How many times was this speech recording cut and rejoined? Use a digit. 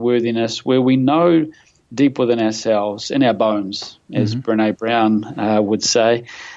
0